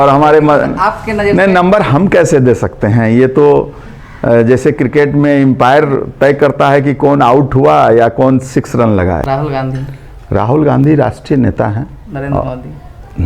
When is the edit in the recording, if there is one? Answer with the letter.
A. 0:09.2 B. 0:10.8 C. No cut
A